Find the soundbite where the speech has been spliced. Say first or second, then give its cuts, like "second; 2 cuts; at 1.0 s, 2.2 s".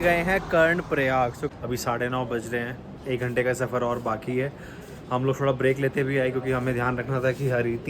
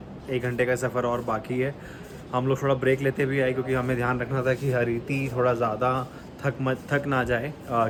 first; 1 cut; at 1.4 s